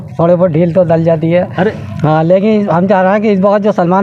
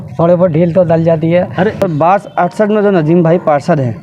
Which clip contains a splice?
second; 1 cut; at 1.8 s

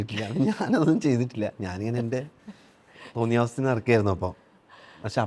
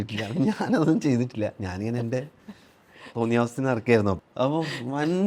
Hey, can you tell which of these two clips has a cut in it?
second; 1 cut; at 4.2 s

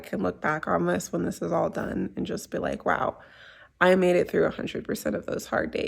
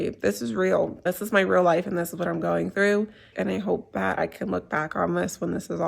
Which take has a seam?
second; 1 cut; at 3.3 s

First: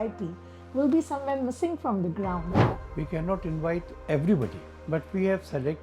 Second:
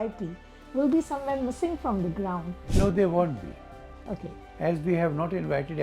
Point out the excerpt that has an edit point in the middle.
first; 3 cuts; at 2.6 s, 3.9 s, 4.7 s

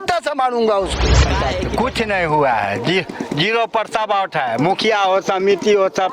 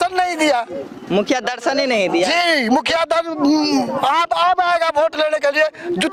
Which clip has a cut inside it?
first; 1 cut; at 1.3 s

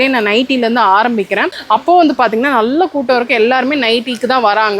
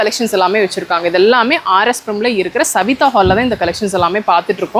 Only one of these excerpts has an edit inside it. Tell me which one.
first; 1 cut; at 1.5 s

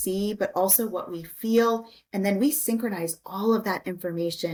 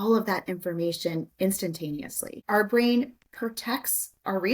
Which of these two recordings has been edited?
second; 1 cut; at 2.4 s

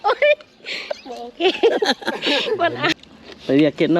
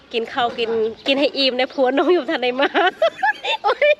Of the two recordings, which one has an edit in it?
first; 1 cut; at 3.0 s

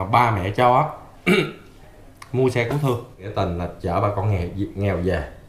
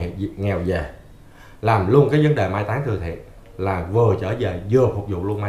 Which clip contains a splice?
first; 1 cut; at 3.3 s

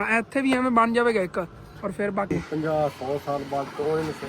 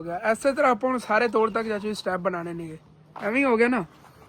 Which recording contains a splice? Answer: first; 1 cut; at 2.3 s

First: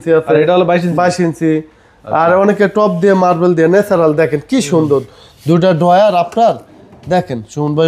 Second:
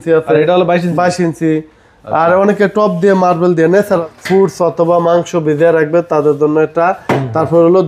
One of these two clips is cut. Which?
second; 1 cut; at 4.0 s

